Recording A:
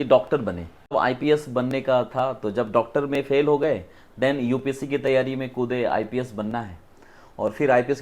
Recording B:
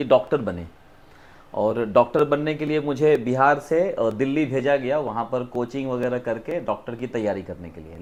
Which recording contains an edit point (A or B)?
A